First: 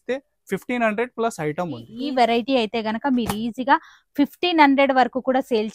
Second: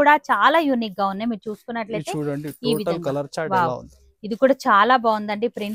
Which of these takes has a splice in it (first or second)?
first